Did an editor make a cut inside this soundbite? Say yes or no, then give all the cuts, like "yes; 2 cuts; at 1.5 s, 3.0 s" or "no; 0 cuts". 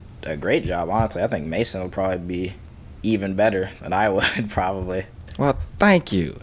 no; 0 cuts